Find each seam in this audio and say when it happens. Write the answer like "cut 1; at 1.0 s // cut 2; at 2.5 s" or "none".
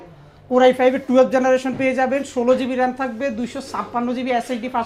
none